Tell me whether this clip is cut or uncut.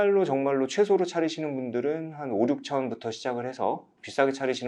uncut